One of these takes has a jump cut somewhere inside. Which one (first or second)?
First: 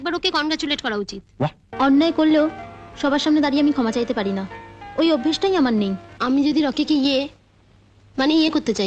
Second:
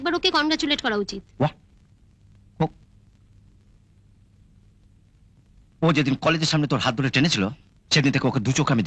first